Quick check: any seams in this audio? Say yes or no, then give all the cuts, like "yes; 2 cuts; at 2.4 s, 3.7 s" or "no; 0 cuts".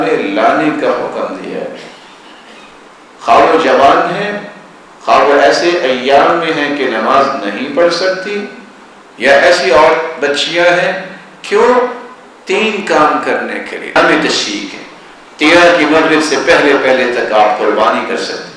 yes; 1 cut; at 14.0 s